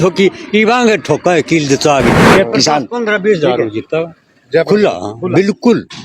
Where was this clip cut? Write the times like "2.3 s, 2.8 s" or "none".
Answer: 2.2 s